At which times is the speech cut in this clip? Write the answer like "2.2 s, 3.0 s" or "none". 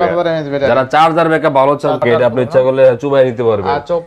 2.0 s